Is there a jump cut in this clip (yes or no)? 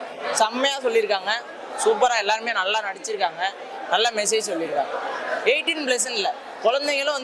no